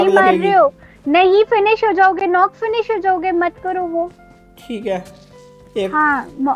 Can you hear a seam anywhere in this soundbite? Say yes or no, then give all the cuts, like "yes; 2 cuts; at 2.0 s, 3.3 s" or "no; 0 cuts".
no; 0 cuts